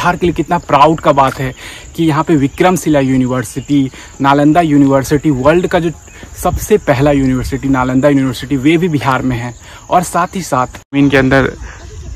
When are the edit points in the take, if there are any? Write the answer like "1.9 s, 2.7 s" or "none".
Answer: 10.8 s